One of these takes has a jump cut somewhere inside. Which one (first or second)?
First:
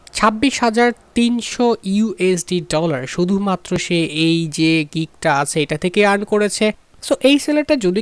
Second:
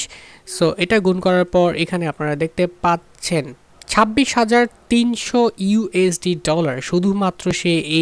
first